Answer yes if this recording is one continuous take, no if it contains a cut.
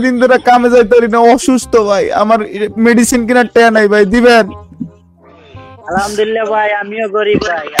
yes